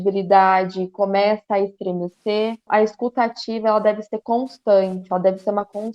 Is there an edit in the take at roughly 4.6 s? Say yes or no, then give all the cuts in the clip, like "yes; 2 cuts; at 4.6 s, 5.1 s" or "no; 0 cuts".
no; 1 cut; at 2.6 s